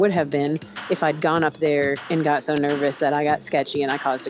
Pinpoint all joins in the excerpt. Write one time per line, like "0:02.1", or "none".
0:02.0